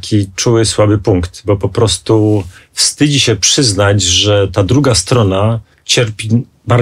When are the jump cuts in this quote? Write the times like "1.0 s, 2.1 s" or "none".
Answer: none